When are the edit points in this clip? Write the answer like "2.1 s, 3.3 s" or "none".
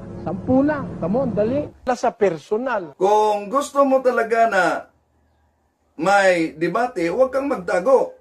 1.9 s

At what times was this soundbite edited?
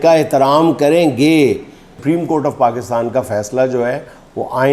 2.0 s

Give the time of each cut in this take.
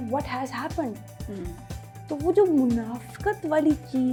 none

